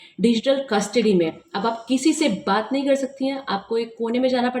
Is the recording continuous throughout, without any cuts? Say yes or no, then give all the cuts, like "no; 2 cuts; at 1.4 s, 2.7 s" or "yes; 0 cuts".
yes; 0 cuts